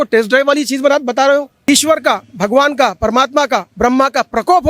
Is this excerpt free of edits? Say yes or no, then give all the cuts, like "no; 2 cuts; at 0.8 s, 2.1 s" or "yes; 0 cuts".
no; 1 cut; at 1.7 s